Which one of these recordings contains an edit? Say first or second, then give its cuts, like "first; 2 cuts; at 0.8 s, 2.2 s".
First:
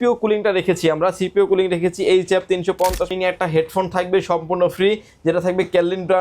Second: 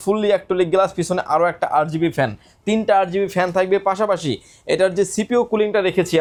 first; 1 cut; at 3.1 s